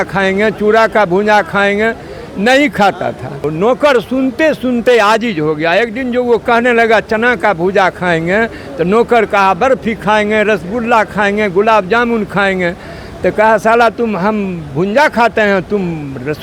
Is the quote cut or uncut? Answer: cut